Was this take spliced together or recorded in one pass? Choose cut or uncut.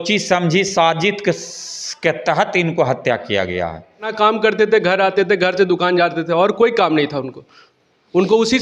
cut